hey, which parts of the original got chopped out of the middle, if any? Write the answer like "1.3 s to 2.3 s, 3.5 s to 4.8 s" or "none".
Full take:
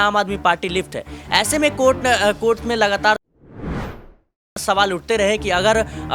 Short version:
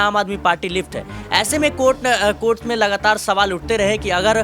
3.2 s to 4.6 s